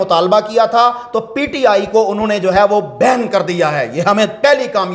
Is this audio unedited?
yes; 0 cuts

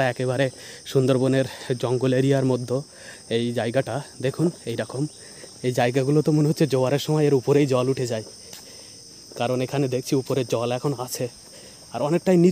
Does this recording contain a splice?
no; 0 cuts

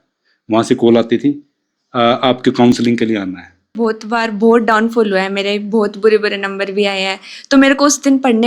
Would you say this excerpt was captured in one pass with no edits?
no; 1 cut; at 3.8 s

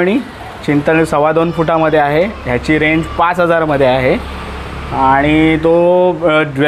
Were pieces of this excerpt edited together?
no; 0 cuts

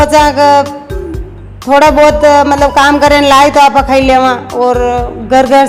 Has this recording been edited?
no; 0 cuts

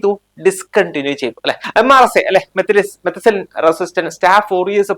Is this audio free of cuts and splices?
no; 1 cut; at 1.6 s

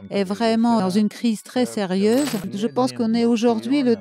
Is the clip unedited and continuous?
no; 2 cuts; at 0.8 s, 2.5 s

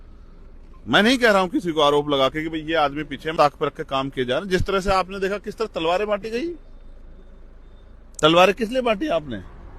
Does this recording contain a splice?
yes; 1 cut; at 3.3 s

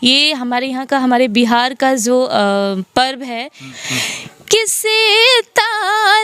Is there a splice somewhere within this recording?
yes; 1 cut; at 3.7 s

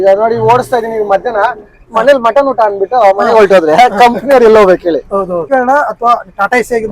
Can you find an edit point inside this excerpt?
yes; 1 cut; at 5.5 s

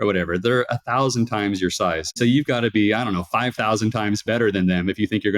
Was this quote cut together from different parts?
yes; 1 cut; at 2.2 s

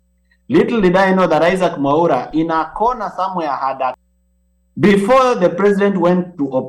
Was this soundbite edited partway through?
yes; 1 cut; at 4.0 s

